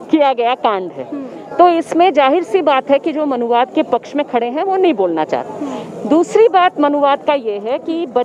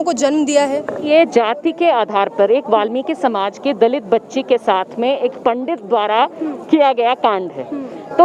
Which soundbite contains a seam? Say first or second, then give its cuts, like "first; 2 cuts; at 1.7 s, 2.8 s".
second; 1 cut; at 1.1 s